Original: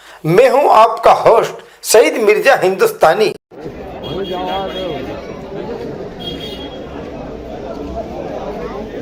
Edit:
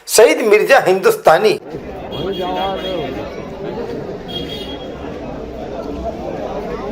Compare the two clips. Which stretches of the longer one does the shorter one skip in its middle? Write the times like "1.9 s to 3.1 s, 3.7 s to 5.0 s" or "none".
3.5 s to 3.6 s